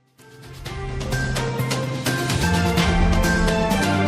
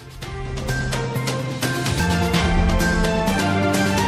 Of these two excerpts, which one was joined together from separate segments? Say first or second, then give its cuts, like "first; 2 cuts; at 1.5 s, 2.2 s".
first; 1 cut; at 1.3 s